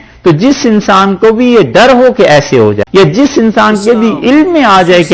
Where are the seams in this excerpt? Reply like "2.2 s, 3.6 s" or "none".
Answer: 2.8 s